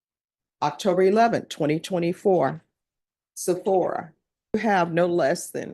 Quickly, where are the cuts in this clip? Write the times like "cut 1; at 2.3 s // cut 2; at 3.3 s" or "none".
cut 1; at 4.6 s